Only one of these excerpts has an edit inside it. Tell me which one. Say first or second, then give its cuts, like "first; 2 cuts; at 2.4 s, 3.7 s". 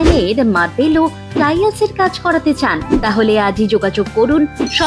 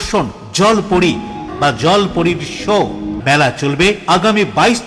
second; 2 cuts; at 1.5 s, 3.1 s